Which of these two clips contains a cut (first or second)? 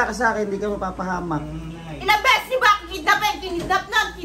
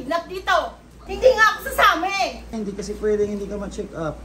second